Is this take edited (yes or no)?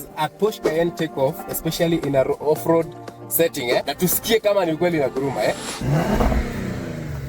yes